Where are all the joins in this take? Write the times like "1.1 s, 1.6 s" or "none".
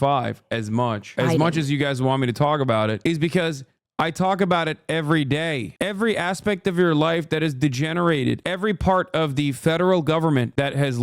1.1 s, 5.7 s